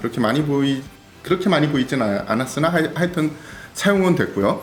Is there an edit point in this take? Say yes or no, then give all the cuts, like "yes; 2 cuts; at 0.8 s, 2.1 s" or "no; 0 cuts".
no; 0 cuts